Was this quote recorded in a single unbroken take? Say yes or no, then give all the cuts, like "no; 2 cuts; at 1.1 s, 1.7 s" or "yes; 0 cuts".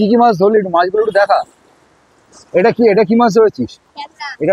yes; 0 cuts